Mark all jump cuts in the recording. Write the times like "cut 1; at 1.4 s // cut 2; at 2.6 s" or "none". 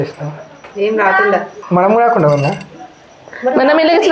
cut 1; at 1.6 s